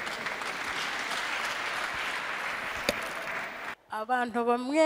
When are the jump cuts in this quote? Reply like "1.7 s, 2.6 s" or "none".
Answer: 3.8 s